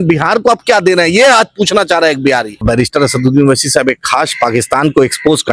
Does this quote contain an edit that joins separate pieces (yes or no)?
yes